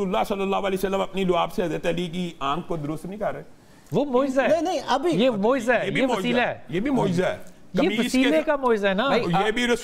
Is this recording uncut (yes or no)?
yes